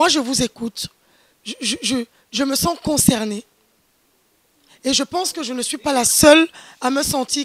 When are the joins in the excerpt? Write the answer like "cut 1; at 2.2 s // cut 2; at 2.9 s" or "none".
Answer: none